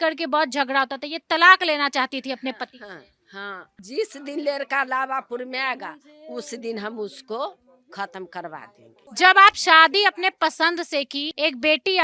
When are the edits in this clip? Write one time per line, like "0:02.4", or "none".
0:03.8
0:09.1